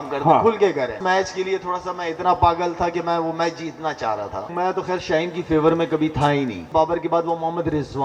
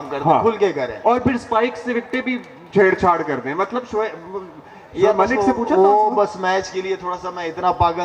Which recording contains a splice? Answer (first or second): first